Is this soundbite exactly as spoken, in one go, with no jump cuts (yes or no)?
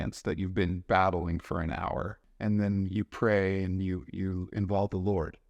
no